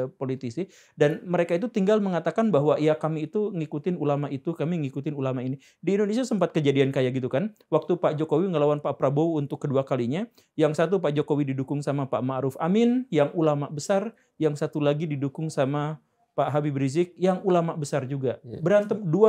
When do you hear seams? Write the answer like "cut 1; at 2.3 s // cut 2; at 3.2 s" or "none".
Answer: none